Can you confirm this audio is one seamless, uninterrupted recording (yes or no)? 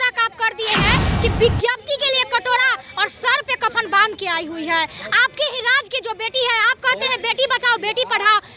yes